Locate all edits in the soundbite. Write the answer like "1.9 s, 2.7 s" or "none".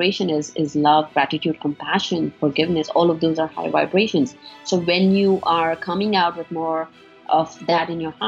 none